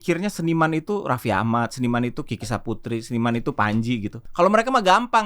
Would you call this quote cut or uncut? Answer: cut